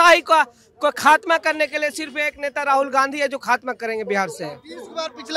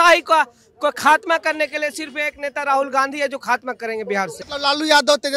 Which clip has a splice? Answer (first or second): second